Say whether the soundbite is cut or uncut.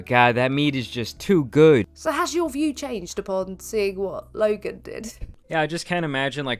cut